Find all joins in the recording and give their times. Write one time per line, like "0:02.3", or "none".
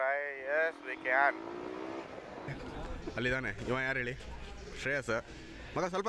0:02.5